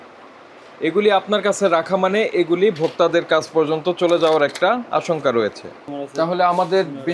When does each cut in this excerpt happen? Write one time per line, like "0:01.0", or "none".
0:05.9

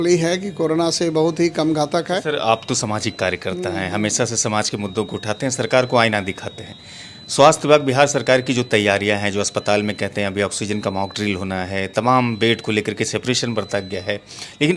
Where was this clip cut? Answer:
0:02.2

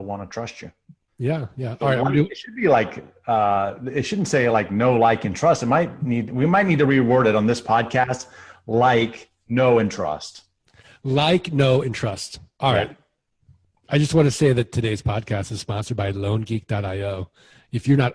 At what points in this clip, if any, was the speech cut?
0:03.7

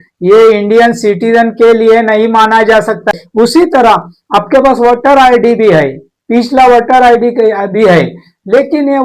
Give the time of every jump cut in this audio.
0:03.2

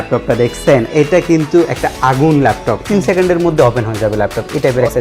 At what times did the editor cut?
0:02.8

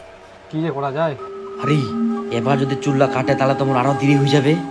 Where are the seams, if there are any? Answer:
0:01.3

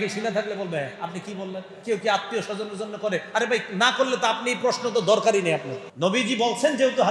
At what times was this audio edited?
0:05.8

